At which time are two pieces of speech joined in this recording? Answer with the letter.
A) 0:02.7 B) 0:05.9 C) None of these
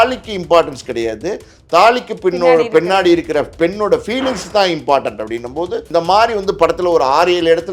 B